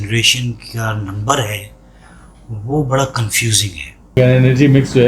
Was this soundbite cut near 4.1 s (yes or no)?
yes